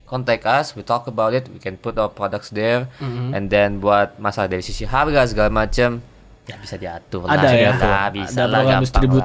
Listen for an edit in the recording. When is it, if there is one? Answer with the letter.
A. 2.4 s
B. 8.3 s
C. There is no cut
C